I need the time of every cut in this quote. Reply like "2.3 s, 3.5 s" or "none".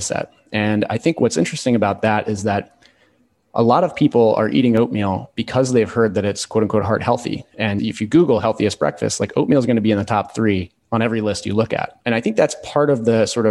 7.8 s, 12.0 s